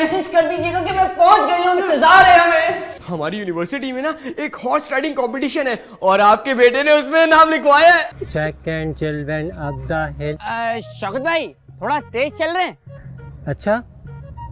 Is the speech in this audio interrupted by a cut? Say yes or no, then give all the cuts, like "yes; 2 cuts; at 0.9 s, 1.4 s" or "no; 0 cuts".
yes; 2 cuts; at 3.0 s, 8.2 s